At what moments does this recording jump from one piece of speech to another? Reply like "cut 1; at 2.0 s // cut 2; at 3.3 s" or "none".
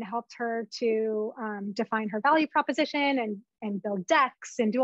none